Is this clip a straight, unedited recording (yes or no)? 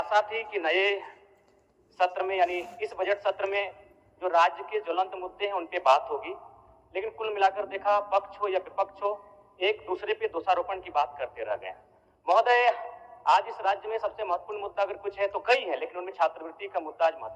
yes